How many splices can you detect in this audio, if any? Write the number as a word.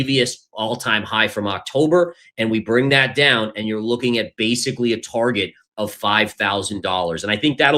zero